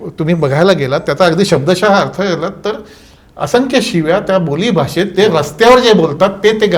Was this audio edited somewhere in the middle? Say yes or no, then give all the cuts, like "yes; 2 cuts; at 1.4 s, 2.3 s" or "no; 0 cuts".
no; 0 cuts